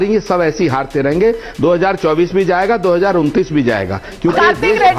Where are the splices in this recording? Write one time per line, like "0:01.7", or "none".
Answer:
0:04.0